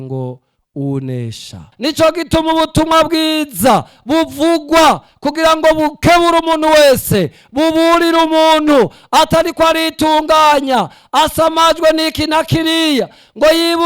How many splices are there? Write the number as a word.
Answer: one